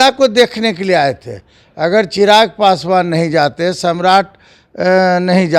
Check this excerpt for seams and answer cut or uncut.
uncut